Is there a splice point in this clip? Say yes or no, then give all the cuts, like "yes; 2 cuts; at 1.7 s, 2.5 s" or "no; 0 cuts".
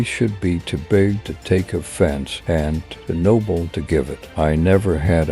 yes; 2 cuts; at 2.3 s, 4.2 s